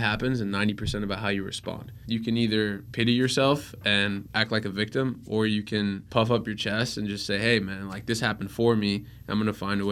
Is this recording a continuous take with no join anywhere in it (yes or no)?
no